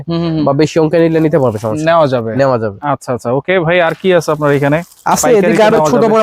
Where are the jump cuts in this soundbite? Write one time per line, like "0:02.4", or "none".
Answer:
none